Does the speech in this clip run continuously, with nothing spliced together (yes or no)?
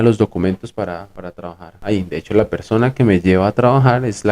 no